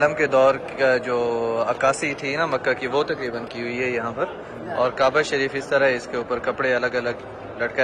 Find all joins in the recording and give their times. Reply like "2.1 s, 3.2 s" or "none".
none